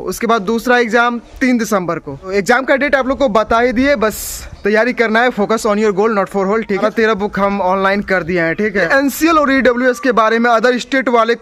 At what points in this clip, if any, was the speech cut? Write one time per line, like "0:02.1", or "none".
0:02.3
0:06.8
0:08.9